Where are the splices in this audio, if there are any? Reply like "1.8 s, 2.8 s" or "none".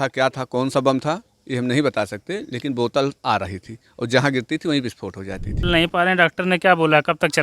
5.5 s